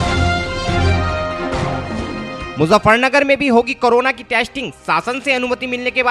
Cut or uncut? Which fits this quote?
uncut